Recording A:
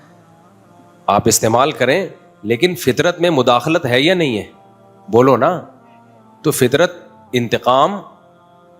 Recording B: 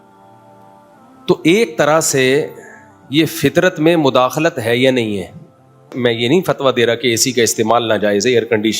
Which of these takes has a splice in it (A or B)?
B